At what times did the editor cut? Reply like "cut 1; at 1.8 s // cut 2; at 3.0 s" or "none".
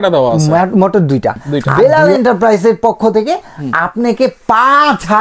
cut 1; at 1.7 s